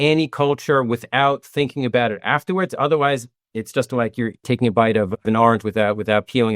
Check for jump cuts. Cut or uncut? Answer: cut